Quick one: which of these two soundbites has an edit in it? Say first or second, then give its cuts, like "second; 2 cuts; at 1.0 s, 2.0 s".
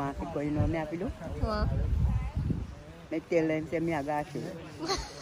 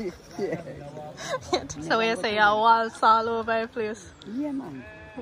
second; 1 cut; at 1.7 s